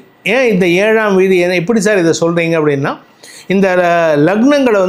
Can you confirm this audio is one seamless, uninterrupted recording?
yes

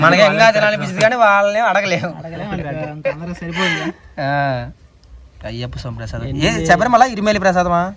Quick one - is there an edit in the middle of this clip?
no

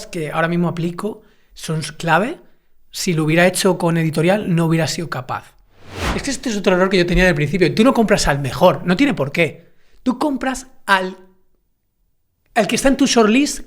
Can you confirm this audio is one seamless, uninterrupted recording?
no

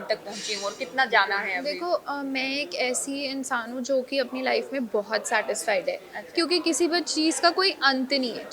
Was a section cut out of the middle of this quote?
no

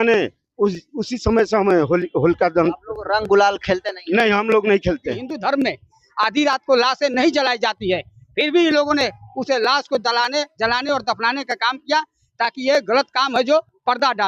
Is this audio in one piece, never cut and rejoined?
no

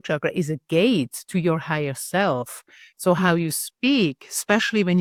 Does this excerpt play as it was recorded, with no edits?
yes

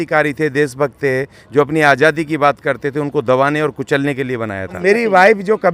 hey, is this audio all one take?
no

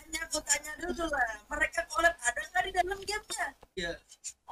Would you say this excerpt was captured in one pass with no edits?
no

